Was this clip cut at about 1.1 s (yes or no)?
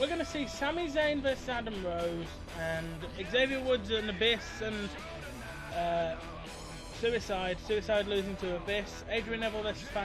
no